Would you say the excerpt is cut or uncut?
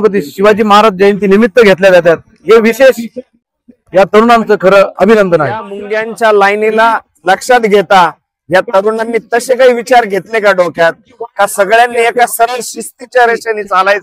cut